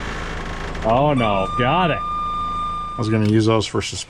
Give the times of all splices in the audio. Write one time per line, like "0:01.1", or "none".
0:02.9